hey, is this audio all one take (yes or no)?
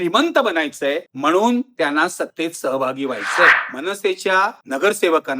no